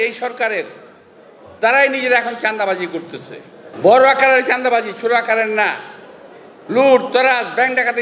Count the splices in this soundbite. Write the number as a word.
one